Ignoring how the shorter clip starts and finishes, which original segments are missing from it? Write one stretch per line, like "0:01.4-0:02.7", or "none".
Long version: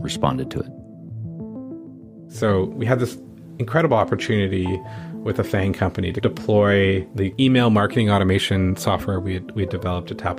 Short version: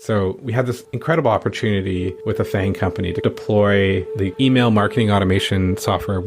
0:03.2-0:03.5
0:04.8-0:05.2